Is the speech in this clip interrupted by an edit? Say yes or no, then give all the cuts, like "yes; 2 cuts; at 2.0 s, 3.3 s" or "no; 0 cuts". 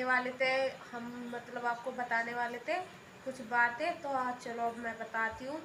no; 0 cuts